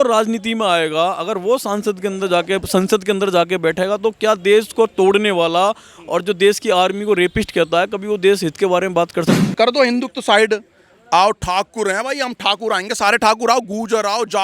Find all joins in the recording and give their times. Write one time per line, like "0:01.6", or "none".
0:09.3